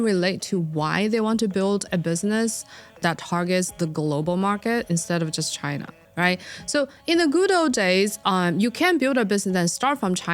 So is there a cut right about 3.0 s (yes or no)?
yes